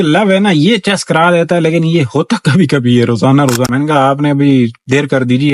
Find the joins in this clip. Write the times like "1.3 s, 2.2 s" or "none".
3.7 s